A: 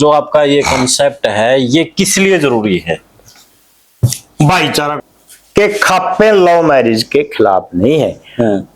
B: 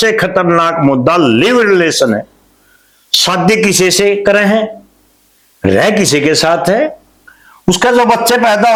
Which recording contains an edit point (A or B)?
A